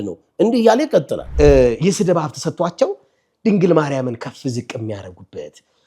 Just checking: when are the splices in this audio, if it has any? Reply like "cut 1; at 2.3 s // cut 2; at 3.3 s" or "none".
cut 1; at 1.2 s